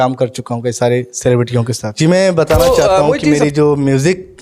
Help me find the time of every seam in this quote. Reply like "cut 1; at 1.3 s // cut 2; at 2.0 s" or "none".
cut 1; at 1.9 s